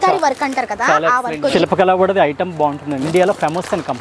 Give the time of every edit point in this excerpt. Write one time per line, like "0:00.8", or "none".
0:01.5
0:03.0